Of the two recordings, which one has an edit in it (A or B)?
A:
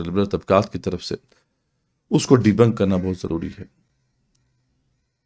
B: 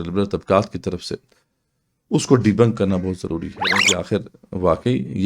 B